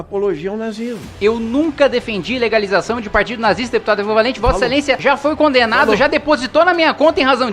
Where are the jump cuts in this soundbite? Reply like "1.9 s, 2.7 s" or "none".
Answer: 1.0 s, 5.0 s